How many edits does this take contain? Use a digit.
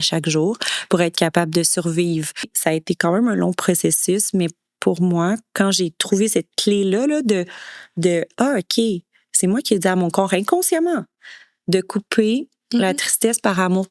1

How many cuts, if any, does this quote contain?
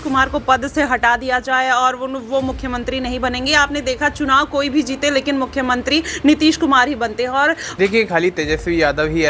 1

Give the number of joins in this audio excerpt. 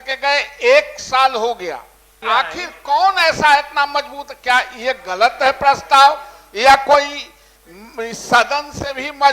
1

